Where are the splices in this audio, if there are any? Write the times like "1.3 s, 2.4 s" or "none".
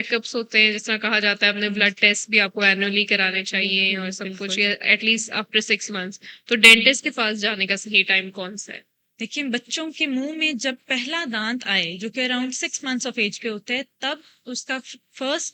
none